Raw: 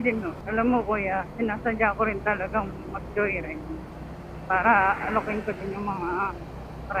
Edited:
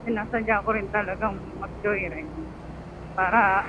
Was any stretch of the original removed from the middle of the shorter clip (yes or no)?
no